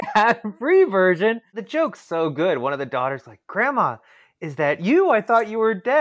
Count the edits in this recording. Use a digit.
1